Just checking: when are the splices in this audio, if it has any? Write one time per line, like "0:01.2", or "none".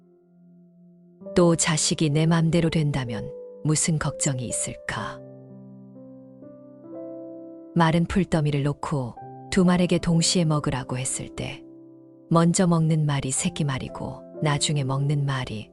0:05.1
0:07.7